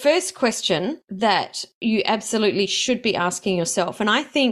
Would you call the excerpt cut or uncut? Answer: cut